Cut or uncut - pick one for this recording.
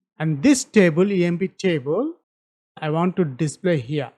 cut